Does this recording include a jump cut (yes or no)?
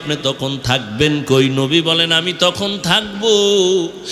no